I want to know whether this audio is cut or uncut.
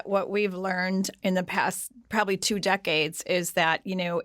cut